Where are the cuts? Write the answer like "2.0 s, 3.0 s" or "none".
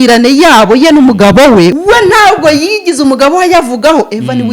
1.7 s